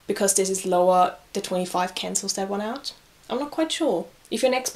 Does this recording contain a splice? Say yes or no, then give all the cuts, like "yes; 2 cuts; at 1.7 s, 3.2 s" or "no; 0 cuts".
no; 0 cuts